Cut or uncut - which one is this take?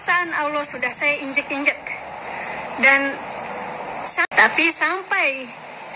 cut